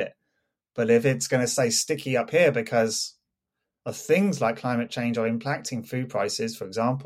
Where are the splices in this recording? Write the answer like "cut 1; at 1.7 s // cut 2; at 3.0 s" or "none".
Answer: none